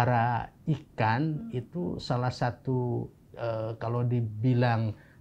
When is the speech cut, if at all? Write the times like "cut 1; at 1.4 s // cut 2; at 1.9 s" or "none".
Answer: none